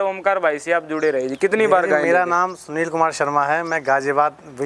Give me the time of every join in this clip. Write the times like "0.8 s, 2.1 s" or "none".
none